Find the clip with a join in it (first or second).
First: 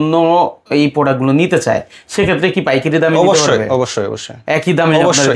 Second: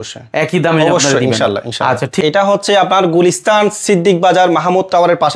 second